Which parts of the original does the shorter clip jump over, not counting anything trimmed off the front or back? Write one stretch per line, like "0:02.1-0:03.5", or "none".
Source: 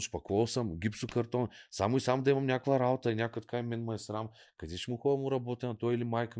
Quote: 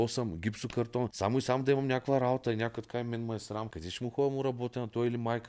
0:01.5-0:01.7
0:04.4-0:04.7